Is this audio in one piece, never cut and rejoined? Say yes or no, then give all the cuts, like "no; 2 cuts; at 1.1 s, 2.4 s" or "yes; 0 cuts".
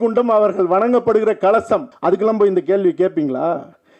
no; 1 cut; at 1.9 s